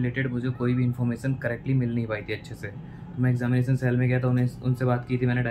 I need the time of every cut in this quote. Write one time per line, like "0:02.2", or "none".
none